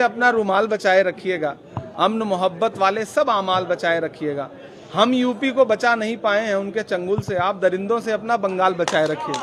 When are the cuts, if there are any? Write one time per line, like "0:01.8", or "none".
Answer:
none